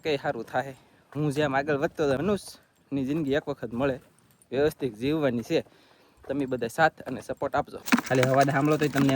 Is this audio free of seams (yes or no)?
no